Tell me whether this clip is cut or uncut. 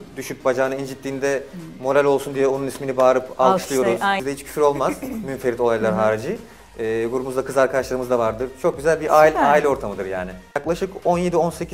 cut